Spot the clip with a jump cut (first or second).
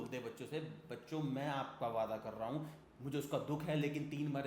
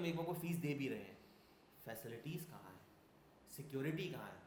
first